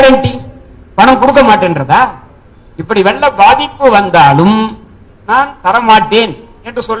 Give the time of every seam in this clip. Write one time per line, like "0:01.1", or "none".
none

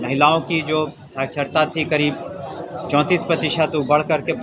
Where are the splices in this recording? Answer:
none

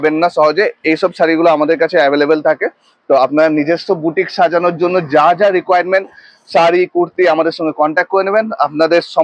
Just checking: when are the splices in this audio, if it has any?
none

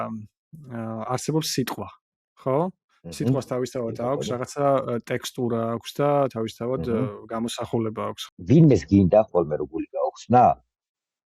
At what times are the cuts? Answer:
0:08.2

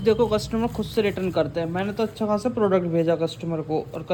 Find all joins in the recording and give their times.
none

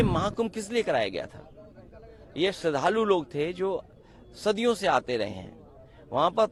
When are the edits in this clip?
none

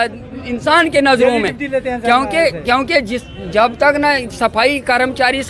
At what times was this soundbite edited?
none

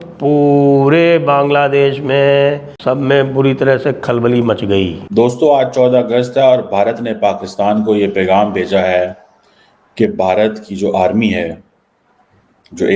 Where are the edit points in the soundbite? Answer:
0:02.7
0:05.0

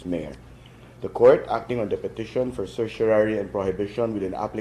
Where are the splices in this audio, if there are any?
0:01.1

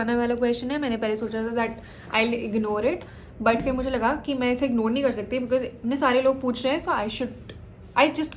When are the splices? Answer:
none

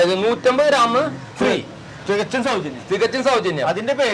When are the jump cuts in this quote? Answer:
none

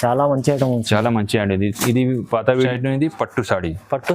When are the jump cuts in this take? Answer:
0:02.7

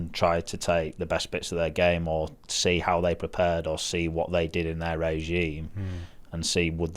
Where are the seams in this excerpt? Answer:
none

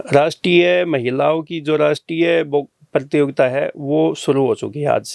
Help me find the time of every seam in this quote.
none

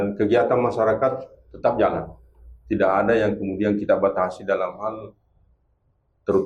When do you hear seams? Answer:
none

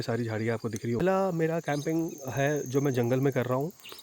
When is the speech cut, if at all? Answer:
0:01.0

